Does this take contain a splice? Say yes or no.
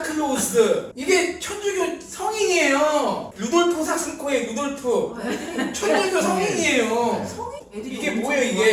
yes